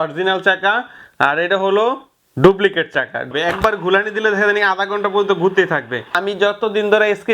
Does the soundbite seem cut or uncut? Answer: cut